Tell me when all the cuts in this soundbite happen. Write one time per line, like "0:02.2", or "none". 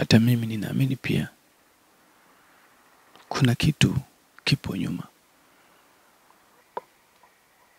0:06.6